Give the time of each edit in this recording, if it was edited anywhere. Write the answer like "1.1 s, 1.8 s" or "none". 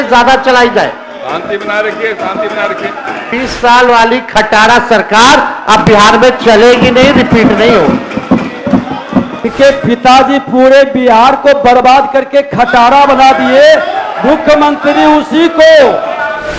3.3 s, 9.4 s